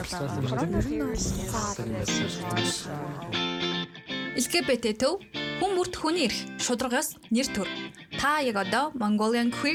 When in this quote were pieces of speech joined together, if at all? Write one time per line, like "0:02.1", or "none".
none